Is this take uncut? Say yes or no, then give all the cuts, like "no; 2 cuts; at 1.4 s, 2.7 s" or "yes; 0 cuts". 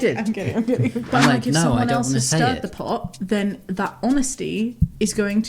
no; 1 cut; at 1.0 s